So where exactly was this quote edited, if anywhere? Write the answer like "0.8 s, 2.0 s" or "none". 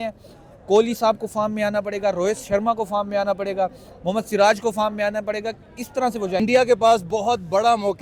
6.4 s